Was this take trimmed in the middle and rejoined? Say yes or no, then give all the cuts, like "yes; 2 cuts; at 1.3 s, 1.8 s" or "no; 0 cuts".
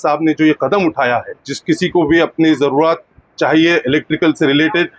yes; 1 cut; at 1.5 s